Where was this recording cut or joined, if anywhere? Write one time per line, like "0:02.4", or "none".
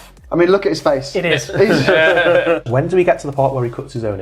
0:02.6